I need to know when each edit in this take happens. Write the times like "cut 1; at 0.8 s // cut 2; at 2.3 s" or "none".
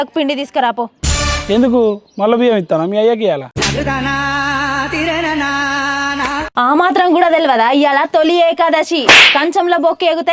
cut 1; at 1.0 s // cut 2; at 6.5 s

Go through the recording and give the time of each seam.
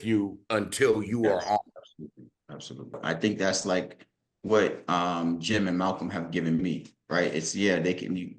cut 1; at 3.0 s

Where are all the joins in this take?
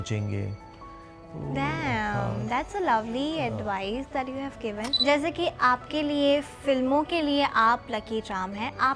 cut 1; at 4.9 s

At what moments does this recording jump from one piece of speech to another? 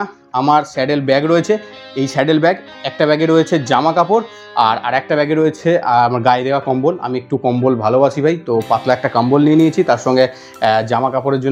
none

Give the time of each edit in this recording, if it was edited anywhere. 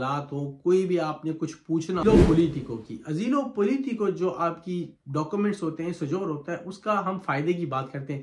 cut 1; at 2.0 s

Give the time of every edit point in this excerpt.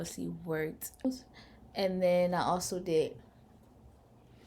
cut 1; at 1.0 s

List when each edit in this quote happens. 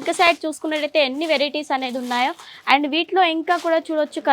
none

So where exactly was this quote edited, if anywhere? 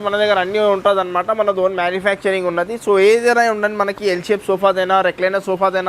none

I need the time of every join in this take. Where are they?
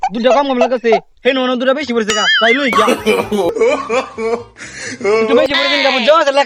cut 1; at 3.5 s // cut 2; at 5.4 s

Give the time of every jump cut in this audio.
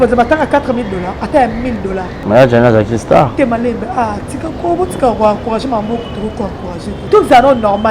cut 1; at 2.1 s // cut 2; at 7.0 s

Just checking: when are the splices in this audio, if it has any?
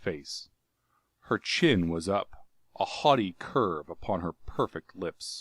none

